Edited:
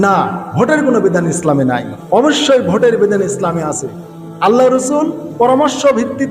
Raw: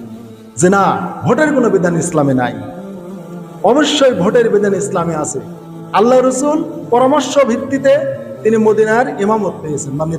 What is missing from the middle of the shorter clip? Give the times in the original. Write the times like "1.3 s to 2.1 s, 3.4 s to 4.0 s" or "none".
2.6 s to 3.5 s